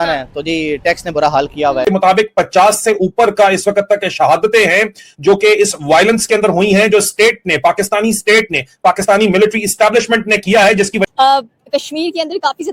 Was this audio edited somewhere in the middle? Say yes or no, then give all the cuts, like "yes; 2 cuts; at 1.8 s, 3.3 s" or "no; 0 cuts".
yes; 2 cuts; at 1.9 s, 11.0 s